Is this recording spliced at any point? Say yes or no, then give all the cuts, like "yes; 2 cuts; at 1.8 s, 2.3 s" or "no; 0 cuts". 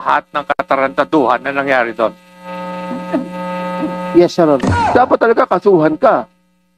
yes; 1 cut; at 4.9 s